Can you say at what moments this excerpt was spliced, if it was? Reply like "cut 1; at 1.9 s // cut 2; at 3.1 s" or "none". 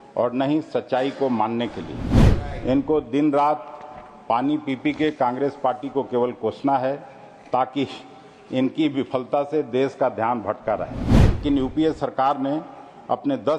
cut 1; at 11.4 s